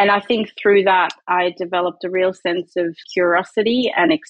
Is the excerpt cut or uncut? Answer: cut